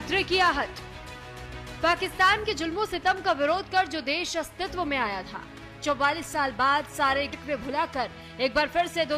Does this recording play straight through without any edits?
yes; 0 cuts

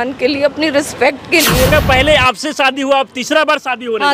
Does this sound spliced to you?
yes; 1 cut; at 1.7 s

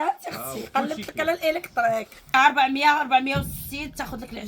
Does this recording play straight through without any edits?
no; 1 cut; at 2.3 s

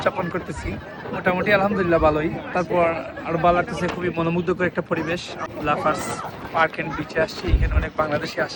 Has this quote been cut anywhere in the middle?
no; 0 cuts

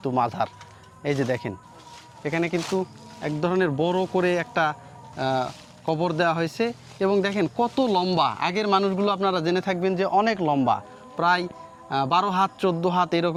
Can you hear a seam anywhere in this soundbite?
no; 0 cuts

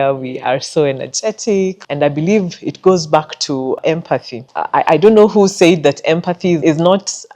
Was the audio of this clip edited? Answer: yes; 3 cuts; at 1.8 s, 4.1 s, 6.6 s

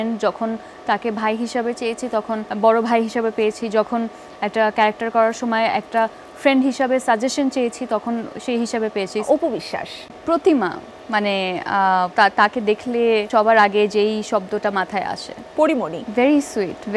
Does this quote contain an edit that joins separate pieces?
yes; 5 cuts; at 2.5 s, 9.2 s, 12.1 s, 13.3 s, 15.6 s

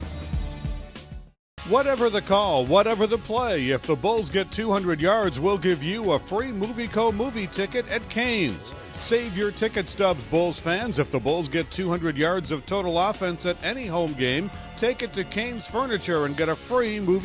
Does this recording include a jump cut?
yes; 1 cut; at 1.0 s

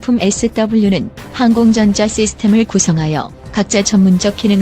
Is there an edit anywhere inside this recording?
yes; 1 cut; at 1.3 s

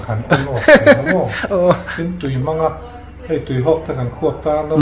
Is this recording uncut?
no; 1 cut; at 1.9 s

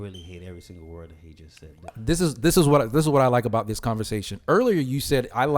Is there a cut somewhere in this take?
yes; 1 cut; at 1.8 s

